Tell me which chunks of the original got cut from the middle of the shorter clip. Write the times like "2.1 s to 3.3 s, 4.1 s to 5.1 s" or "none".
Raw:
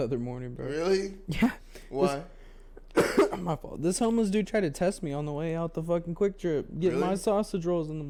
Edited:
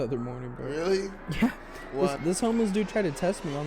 2.2 s to 3.8 s